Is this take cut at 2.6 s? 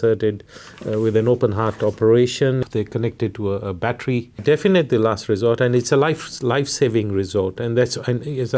yes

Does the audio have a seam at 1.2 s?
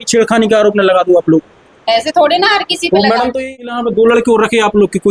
no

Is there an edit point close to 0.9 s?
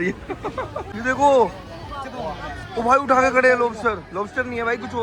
yes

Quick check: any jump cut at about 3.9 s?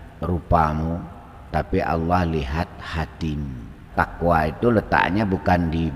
yes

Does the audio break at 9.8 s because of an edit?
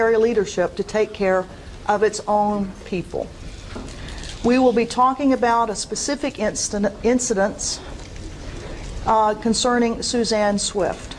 yes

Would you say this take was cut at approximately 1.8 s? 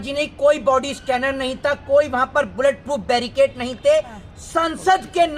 no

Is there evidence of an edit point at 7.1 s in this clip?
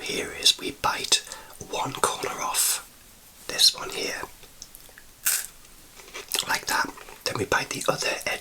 yes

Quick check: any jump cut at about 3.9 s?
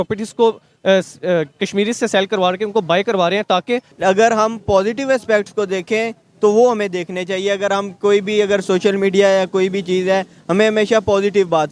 yes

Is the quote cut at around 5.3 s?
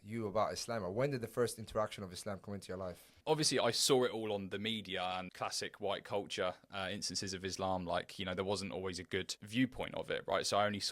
yes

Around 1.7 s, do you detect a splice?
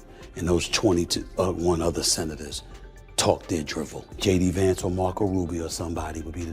no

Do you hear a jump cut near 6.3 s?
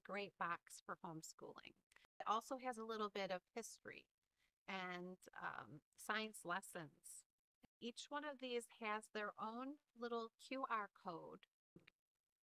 no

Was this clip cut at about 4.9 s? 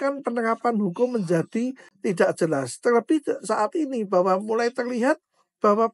no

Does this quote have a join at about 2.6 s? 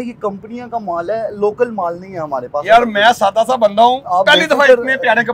no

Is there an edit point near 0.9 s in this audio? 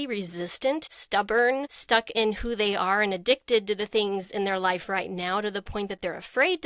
yes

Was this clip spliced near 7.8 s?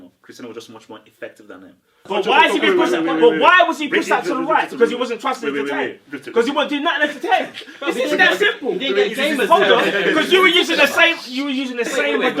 no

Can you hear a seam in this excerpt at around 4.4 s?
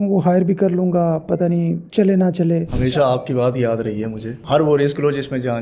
no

